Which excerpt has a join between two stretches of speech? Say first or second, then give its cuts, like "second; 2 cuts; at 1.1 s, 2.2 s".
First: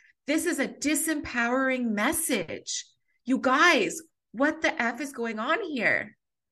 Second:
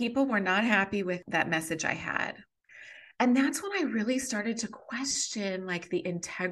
second; 2 cuts; at 1.2 s, 2.5 s